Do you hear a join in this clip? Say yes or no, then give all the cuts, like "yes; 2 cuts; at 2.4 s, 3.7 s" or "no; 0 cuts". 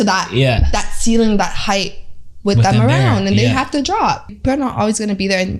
yes; 1 cut; at 4.3 s